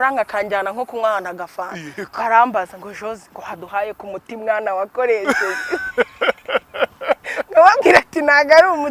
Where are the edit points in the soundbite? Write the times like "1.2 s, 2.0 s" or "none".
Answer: none